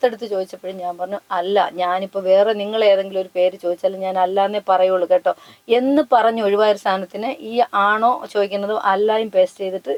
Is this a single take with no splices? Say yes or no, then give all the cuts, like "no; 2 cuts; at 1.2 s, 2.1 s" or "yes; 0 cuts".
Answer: yes; 0 cuts